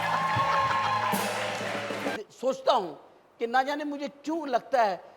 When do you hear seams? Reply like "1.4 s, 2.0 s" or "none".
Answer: 2.2 s